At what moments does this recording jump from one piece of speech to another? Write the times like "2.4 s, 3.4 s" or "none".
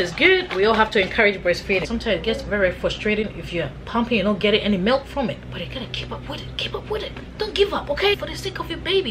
1.9 s, 5.4 s, 8.2 s